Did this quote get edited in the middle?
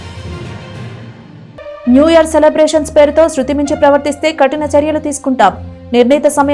yes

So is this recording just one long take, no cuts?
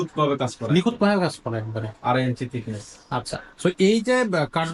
yes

